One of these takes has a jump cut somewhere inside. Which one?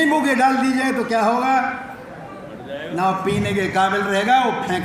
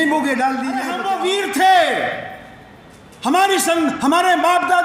second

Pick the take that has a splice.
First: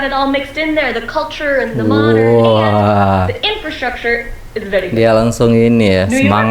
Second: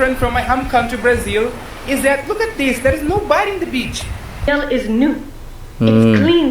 second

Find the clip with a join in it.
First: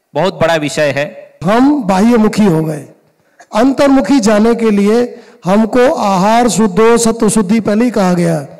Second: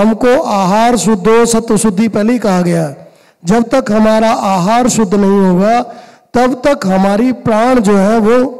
first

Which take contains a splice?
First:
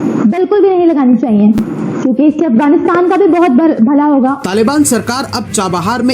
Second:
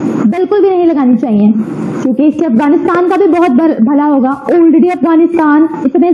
first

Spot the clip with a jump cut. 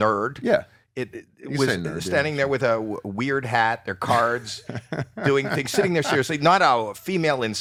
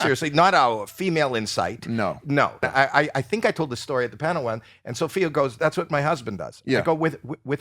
second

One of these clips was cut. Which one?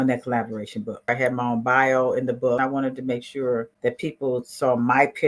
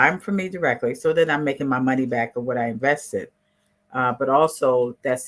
first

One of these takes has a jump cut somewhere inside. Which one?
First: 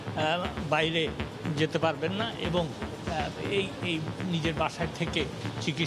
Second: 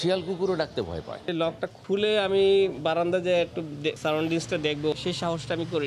second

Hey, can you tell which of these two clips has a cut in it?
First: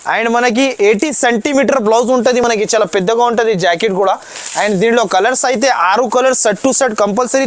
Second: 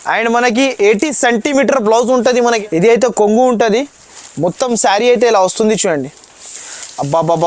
second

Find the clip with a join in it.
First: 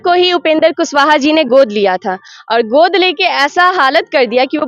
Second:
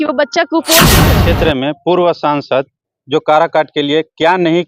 second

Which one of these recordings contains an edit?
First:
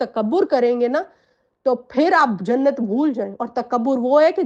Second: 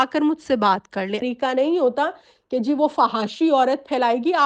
second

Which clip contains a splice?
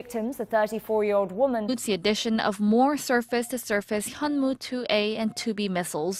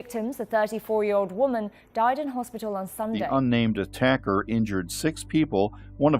second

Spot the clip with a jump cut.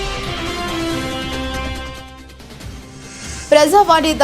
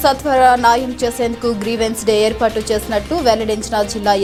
first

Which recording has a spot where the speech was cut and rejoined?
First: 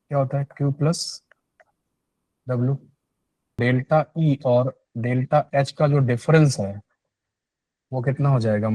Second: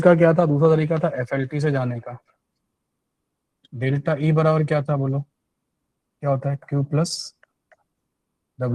first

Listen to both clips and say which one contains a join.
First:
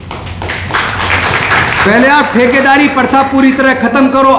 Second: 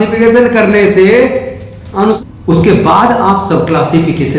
second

